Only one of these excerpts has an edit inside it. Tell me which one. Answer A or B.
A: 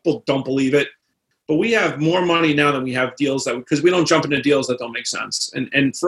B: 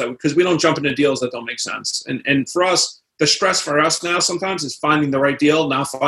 A